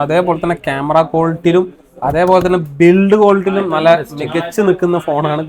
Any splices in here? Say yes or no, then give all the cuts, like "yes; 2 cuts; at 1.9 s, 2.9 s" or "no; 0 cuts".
no; 0 cuts